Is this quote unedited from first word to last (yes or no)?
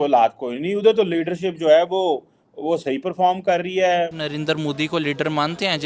no